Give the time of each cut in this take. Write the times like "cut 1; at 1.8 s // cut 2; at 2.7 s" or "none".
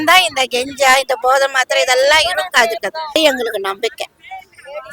cut 1; at 3.2 s

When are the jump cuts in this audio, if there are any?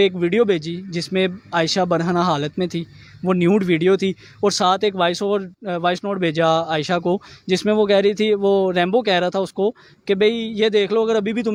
none

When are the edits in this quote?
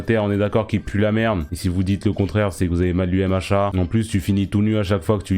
cut 1; at 3.7 s

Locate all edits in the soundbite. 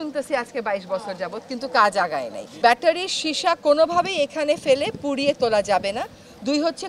cut 1; at 2.5 s

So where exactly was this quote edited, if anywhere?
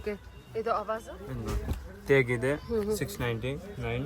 cut 1; at 1.1 s

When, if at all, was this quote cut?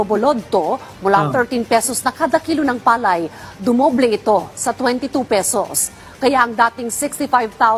cut 1; at 6.7 s

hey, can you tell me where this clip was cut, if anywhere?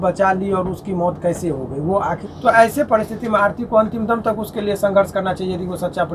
cut 1; at 2.2 s

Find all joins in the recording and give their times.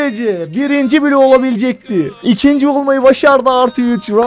cut 1; at 2.1 s

